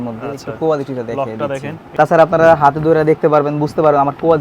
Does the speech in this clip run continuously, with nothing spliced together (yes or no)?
no